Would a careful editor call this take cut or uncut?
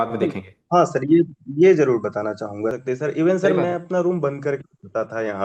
cut